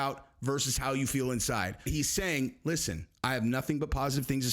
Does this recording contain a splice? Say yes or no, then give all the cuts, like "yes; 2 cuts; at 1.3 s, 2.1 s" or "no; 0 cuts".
yes; 1 cut; at 1.9 s